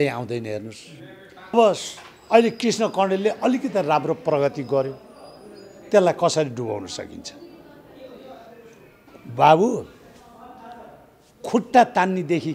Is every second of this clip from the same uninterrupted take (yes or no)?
no